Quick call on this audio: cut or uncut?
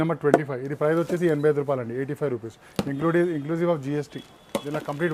uncut